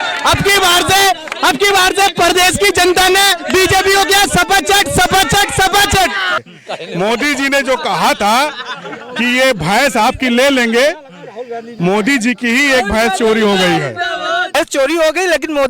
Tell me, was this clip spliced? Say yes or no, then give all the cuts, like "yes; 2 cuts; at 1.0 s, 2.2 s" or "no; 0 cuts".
yes; 2 cuts; at 6.4 s, 14.6 s